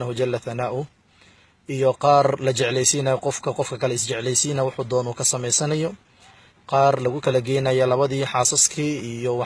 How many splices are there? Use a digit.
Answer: 1